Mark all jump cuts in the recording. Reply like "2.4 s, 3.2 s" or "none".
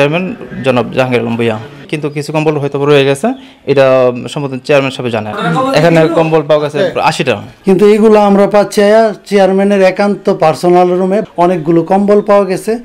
1.8 s, 7.6 s